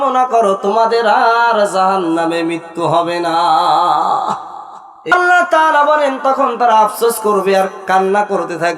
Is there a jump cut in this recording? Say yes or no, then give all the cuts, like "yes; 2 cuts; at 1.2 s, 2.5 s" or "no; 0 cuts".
yes; 1 cut; at 5.1 s